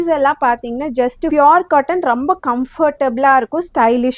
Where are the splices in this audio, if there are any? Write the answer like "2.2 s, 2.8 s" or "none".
1.3 s